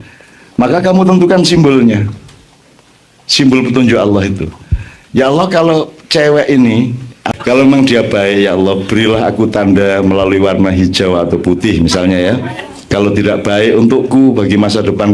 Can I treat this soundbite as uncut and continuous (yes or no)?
no